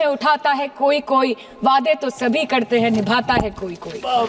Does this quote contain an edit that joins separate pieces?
no; 0 cuts

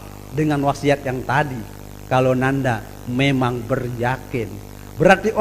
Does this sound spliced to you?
no; 0 cuts

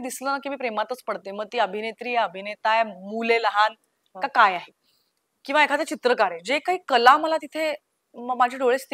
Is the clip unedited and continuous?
yes; 0 cuts

